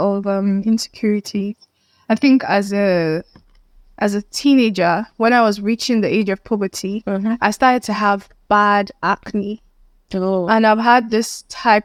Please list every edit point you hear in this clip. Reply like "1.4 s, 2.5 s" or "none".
none